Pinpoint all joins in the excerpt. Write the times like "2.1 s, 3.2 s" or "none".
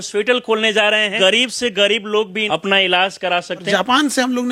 1.1 s, 2.4 s, 3.7 s